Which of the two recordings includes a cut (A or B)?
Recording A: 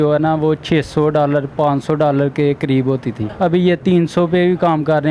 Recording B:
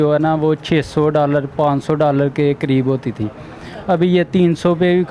A